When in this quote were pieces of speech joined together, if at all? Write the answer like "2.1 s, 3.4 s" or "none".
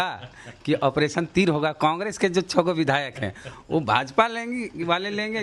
none